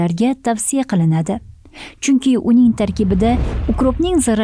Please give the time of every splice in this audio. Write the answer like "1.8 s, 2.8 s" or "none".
3.5 s